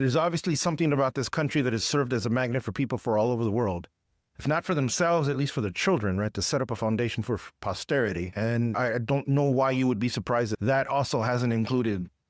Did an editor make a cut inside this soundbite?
yes; 1 cut; at 8.8 s

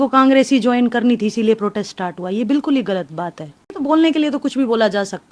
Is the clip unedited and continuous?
no; 1 cut; at 3.7 s

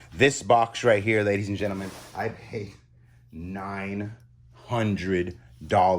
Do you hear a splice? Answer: no; 0 cuts

